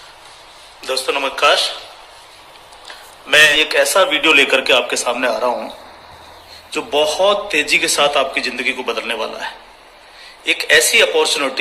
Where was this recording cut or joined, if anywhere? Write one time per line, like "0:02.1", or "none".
0:03.5